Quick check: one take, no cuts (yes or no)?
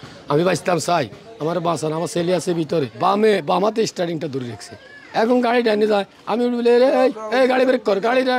no